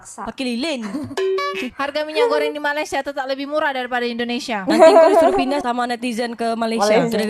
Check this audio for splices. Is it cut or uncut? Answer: cut